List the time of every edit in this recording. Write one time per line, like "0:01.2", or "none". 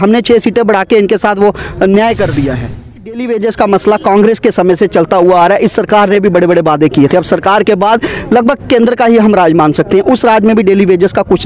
0:03.3